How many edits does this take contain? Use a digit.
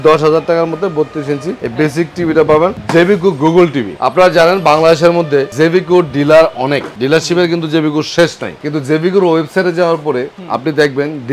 0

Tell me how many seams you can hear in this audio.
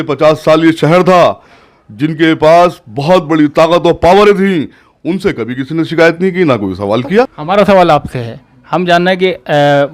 1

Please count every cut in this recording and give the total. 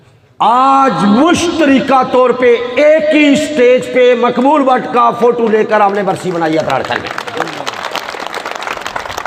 0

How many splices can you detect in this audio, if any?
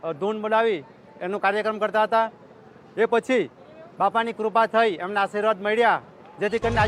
0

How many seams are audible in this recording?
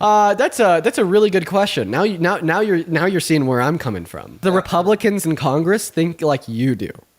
1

